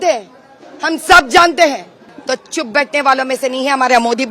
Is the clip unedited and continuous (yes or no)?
no